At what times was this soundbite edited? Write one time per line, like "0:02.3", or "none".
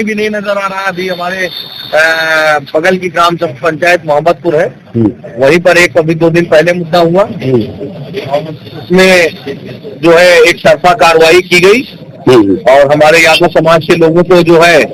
none

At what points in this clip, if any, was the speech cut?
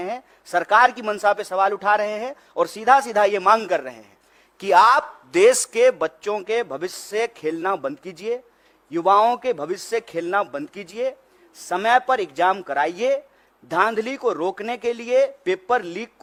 none

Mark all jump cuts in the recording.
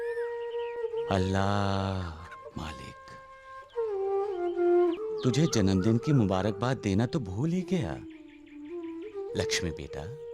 0:05.0

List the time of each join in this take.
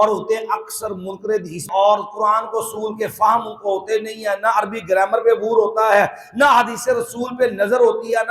0:01.7

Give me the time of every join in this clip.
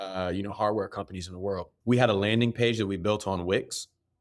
0:01.7

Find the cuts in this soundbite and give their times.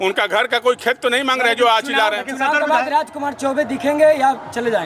none

